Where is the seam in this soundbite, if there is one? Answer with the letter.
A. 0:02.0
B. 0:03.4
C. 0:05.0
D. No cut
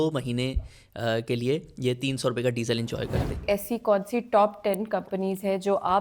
B